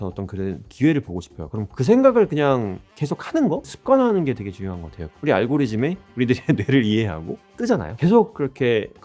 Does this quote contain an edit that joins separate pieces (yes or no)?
yes